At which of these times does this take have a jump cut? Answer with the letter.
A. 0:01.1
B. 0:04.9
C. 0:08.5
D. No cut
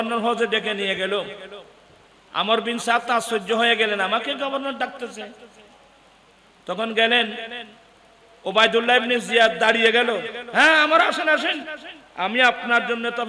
D